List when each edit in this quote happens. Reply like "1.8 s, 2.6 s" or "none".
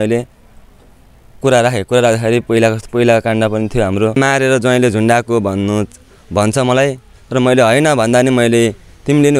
4.1 s